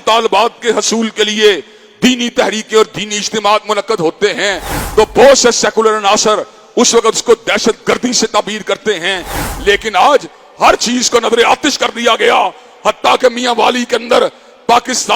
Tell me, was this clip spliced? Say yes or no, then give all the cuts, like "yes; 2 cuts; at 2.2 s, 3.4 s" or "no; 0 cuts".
no; 0 cuts